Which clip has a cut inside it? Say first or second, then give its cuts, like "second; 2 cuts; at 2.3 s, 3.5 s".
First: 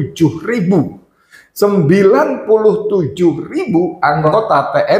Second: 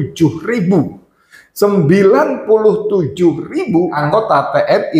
second; 1 cut; at 4.0 s